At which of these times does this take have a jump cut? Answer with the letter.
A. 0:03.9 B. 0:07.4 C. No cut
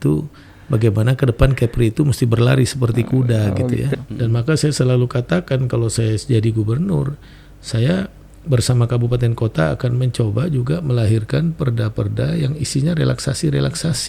A